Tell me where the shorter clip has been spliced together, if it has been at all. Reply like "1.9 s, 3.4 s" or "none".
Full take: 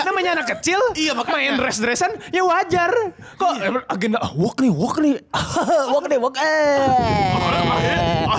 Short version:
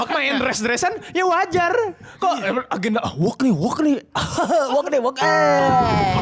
none